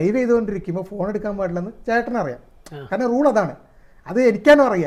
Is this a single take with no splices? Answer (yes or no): yes